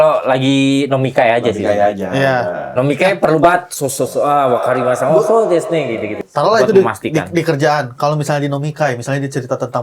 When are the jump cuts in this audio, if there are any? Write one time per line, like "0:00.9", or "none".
0:06.1